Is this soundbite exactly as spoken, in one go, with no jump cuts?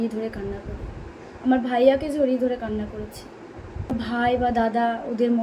no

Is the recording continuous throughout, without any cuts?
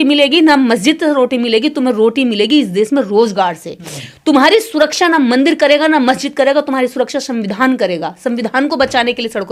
yes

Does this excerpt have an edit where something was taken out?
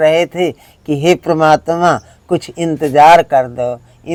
no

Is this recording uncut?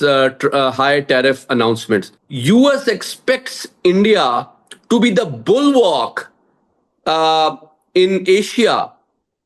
no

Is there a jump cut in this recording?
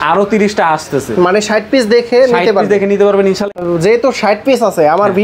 yes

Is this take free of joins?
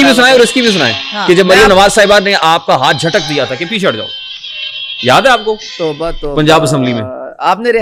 yes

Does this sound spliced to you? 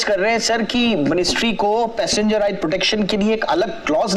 no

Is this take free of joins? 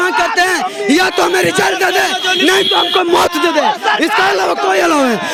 yes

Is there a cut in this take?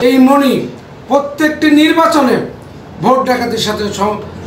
no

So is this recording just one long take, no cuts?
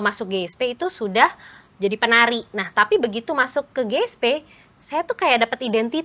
yes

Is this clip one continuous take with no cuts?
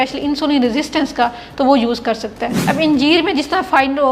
no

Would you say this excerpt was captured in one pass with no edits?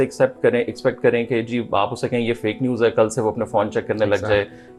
yes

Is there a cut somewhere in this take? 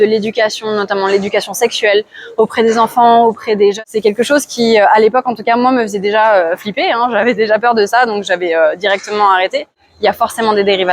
yes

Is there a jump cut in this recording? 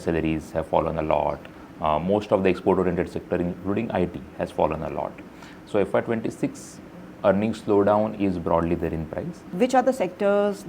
yes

